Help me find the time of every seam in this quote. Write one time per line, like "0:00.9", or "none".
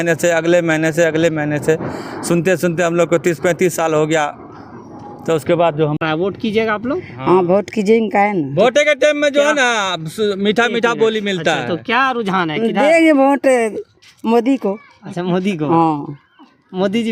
0:06.0

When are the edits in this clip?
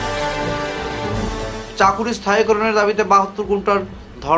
0:01.2

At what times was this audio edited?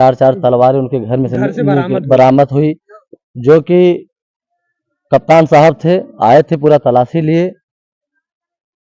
none

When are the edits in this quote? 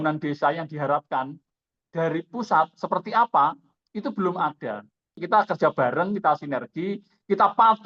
0:05.2

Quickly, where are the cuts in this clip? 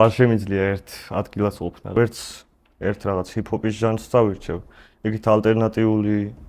0:02.0

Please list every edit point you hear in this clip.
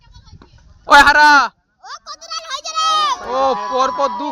none

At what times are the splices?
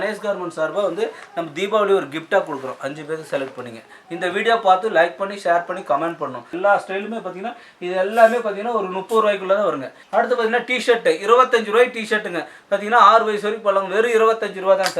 0:06.5
0:09.9

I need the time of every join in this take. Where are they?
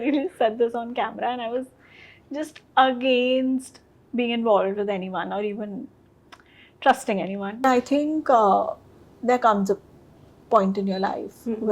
0:07.6

